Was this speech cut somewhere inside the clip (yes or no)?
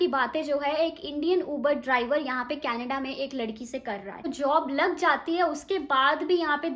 yes